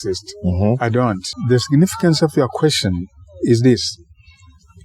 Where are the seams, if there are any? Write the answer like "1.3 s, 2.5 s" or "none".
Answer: 1.3 s